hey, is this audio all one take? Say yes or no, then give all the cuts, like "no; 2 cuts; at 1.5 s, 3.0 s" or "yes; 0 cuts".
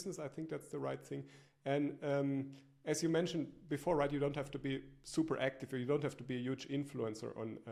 yes; 0 cuts